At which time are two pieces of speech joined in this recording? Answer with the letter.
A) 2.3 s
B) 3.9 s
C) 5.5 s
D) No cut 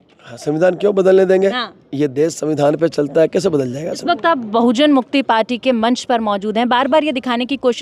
B